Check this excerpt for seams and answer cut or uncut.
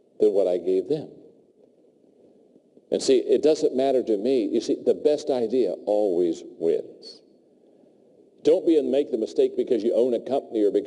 uncut